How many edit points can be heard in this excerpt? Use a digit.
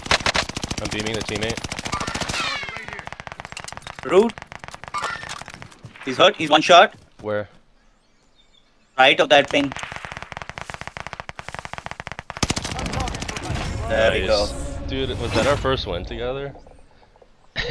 0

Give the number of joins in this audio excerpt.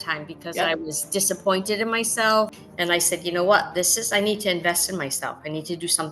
1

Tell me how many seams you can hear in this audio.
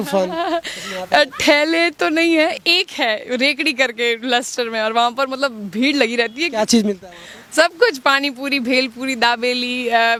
0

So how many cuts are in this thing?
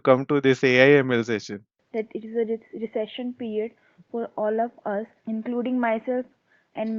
2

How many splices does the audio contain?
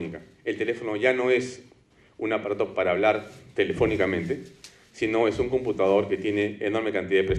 1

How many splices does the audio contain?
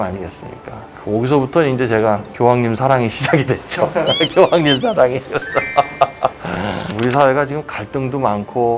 1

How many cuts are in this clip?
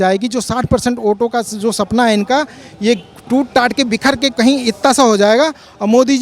0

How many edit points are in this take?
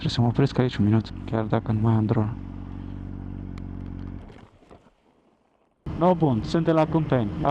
2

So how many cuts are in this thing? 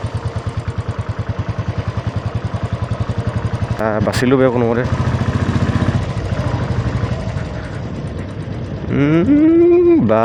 0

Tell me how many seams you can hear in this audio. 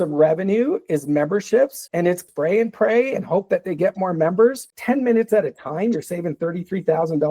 2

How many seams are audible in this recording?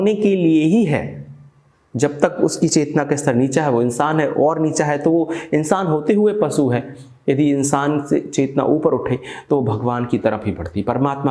0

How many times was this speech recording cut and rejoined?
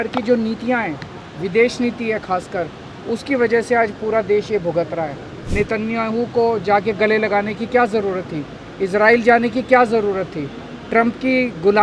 1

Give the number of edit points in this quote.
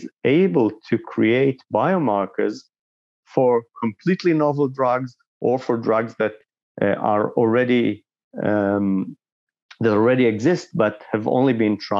0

